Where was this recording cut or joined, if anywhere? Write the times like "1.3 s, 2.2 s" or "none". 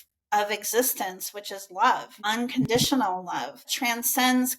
2.2 s, 3.7 s